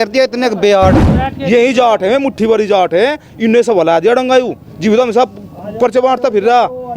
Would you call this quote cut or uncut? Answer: cut